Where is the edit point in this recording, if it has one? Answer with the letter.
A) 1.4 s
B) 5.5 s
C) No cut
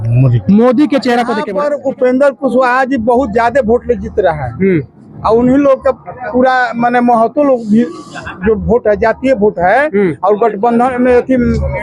A